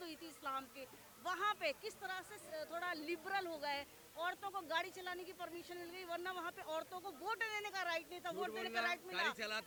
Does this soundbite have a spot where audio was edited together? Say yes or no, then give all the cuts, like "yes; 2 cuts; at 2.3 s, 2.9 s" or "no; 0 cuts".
no; 0 cuts